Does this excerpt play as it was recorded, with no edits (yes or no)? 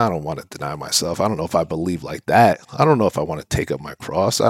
yes